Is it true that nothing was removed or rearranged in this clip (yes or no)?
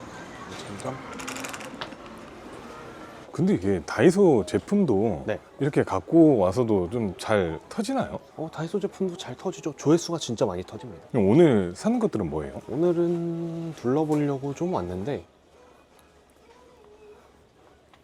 yes